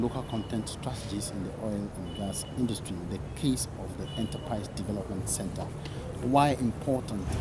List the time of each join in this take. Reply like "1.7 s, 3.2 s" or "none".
none